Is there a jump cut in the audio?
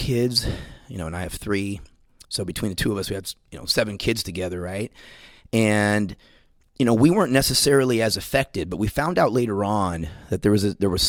no; 0 cuts

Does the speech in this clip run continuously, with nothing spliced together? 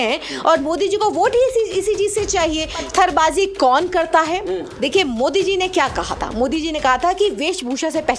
no; 1 cut; at 2.8 s

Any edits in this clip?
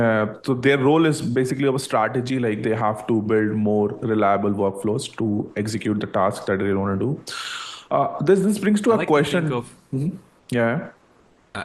no; 0 cuts

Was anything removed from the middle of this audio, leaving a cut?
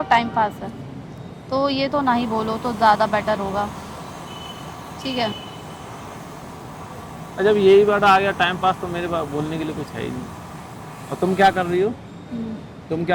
no; 0 cuts

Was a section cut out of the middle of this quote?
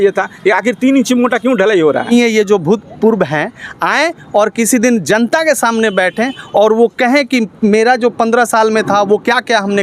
yes; 1 cut; at 2.1 s

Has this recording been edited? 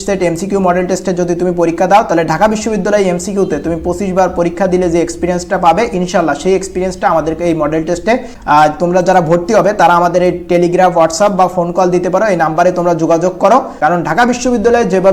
yes; 2 cuts; at 8.3 s, 13.7 s

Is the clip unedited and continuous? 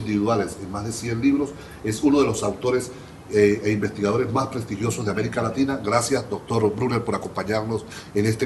no; 1 cut; at 7.1 s

